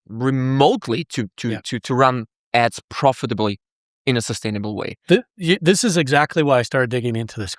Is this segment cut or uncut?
uncut